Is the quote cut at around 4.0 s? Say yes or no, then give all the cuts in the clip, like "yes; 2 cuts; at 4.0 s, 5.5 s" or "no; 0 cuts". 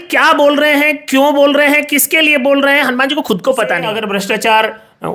yes; 1 cut; at 4.0 s